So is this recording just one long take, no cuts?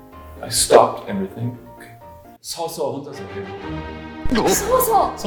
yes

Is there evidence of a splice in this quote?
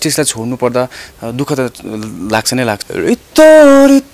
yes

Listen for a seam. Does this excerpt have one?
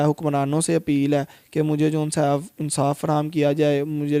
no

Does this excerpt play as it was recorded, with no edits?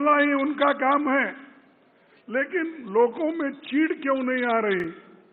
yes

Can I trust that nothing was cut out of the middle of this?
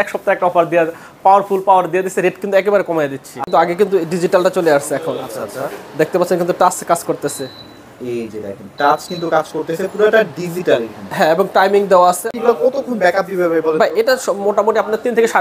no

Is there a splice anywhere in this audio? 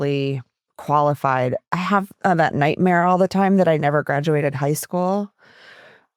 yes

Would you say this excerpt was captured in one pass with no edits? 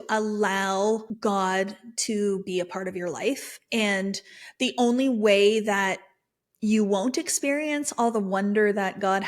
no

